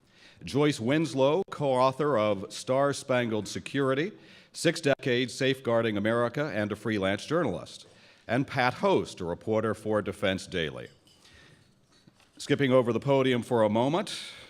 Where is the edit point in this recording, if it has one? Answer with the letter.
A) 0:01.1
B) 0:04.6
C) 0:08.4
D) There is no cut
C